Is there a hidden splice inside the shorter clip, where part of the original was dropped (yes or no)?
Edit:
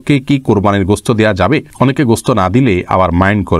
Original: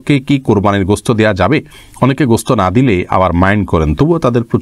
yes